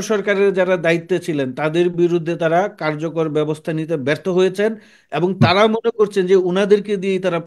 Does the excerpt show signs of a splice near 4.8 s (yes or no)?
no